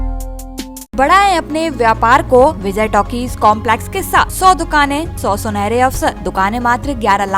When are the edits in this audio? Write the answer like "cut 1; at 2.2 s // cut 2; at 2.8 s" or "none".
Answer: cut 1; at 0.9 s // cut 2; at 2.6 s // cut 3; at 4.3 s // cut 4; at 5.1 s // cut 5; at 6.2 s